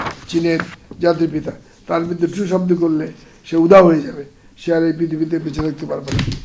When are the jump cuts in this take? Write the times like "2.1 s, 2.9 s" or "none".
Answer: none